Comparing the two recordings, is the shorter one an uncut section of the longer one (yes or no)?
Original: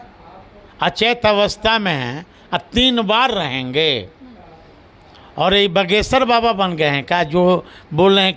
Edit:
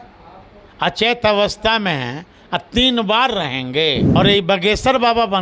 no